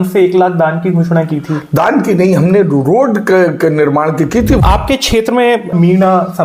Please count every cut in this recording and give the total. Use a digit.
2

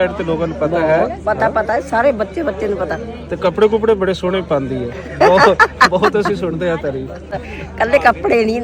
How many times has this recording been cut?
1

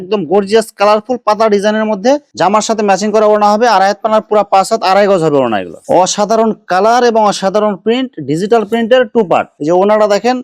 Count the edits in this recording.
3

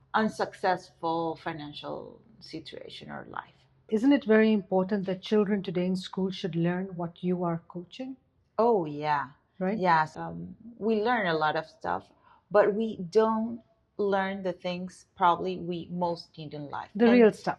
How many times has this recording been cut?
2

